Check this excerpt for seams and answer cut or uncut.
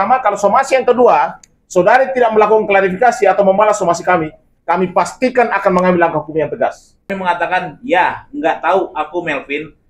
cut